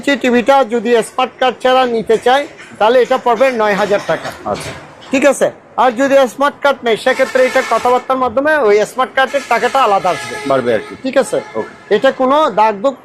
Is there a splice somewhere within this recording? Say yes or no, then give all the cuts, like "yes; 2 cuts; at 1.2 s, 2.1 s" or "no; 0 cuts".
no; 0 cuts